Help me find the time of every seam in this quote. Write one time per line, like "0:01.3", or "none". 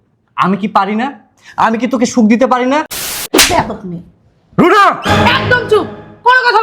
0:03.2